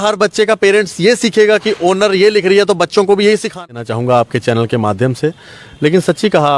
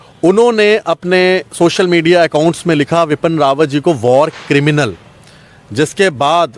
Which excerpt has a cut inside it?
first; 1 cut; at 3.7 s

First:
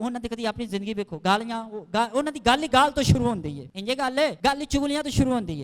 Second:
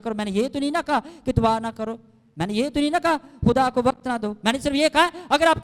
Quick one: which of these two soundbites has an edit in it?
first; 2 cuts; at 3.6 s, 4.4 s

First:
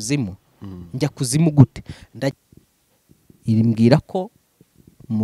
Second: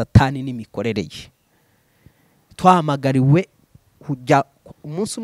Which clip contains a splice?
first; 1 cut; at 2.4 s

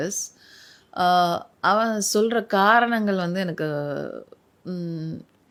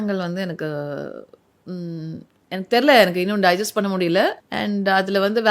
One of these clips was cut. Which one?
second; 1 cut; at 4.5 s

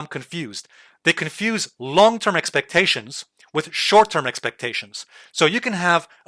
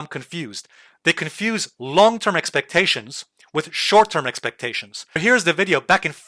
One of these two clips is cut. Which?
second; 1 cut; at 5.2 s

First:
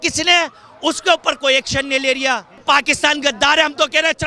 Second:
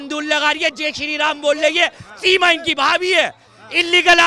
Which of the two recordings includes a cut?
first; 1 cut; at 2.5 s

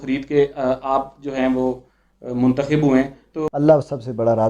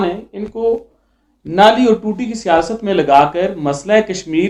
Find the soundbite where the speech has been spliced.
first; 1 cut; at 3.2 s

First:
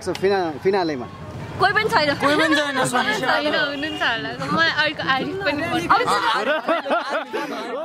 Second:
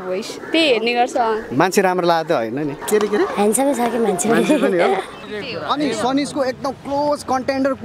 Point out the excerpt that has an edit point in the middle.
second; 2 cuts; at 2.8 s, 5.2 s

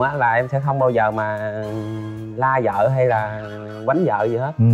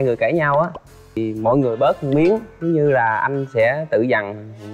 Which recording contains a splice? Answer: second; 1 cut; at 1.2 s

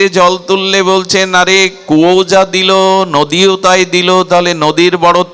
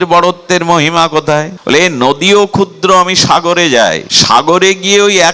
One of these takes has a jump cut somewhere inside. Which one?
second; 2 cuts; at 1.5 s, 4.1 s

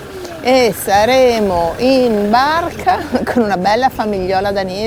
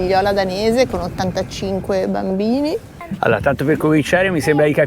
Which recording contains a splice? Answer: second; 1 cut; at 3.0 s

